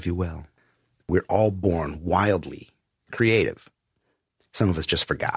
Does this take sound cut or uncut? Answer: cut